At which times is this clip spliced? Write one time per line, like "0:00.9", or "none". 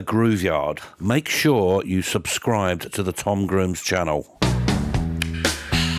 0:00.9
0:04.3

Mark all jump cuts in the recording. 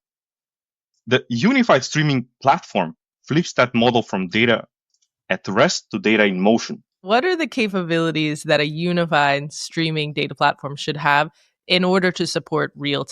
0:07.0

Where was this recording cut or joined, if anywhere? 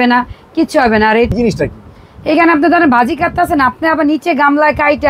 0:01.3

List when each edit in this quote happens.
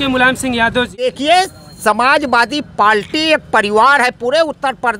0:01.1

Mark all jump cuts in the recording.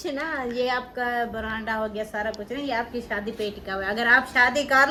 none

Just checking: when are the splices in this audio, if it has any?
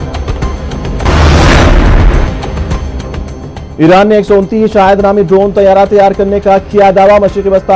0:00.9

